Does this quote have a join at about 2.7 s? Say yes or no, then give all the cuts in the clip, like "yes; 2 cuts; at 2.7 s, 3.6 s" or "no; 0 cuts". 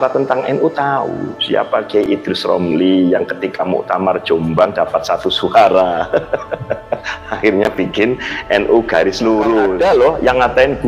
no; 1 cut; at 9.7 s